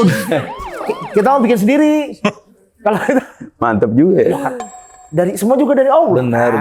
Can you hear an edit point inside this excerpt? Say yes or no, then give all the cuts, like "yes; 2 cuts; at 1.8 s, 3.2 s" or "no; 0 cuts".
no; 0 cuts